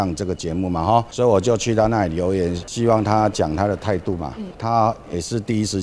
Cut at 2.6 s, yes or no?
yes